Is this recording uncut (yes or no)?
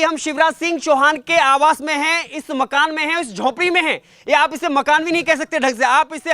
yes